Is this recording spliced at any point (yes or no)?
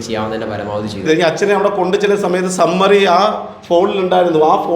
yes